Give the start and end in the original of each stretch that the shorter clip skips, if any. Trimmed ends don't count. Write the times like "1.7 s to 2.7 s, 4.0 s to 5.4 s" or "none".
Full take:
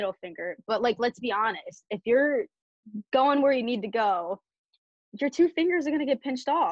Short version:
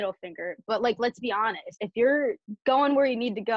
1.7 s to 1.8 s, 2.6 s to 2.9 s